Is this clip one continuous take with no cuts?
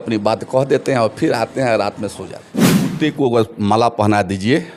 no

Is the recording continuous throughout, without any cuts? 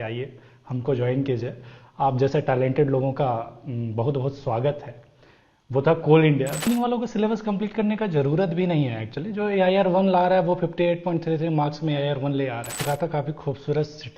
no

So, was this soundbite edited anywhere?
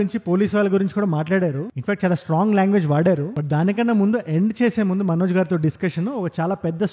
no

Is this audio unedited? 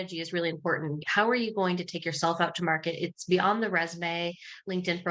no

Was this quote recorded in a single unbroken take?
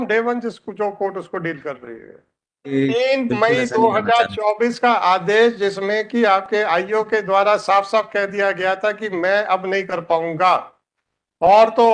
no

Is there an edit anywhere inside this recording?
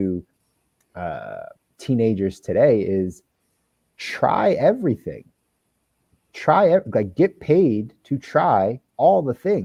no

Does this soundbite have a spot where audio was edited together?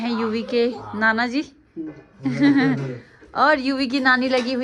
no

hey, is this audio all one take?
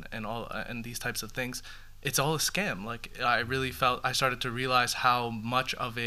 yes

